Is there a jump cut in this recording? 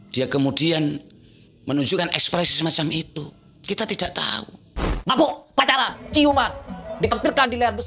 yes; 1 cut; at 4.8 s

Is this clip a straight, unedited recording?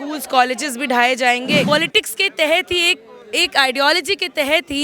no; 1 cut; at 1.7 s

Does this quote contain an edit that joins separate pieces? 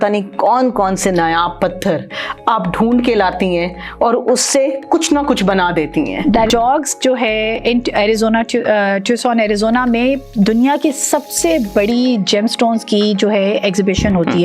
yes; 1 cut; at 6.5 s

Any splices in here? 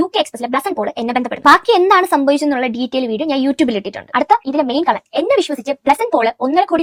no; 0 cuts

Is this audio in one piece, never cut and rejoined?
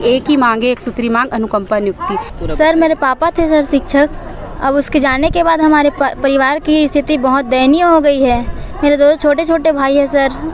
no; 1 cut; at 2.4 s

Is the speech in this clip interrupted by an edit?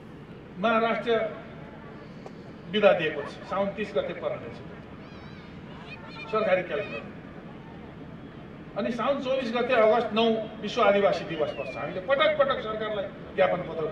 no; 0 cuts

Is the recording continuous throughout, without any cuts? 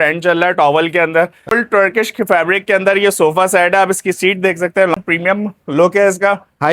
no; 2 cuts; at 1.4 s, 4.9 s

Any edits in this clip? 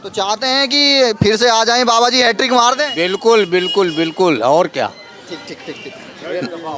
no; 0 cuts

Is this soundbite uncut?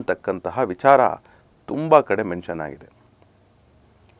yes; 0 cuts

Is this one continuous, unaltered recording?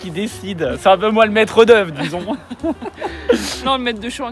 yes; 0 cuts

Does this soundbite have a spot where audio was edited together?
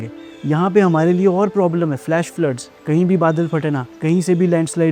yes; 2 cuts; at 2.7 s, 3.9 s

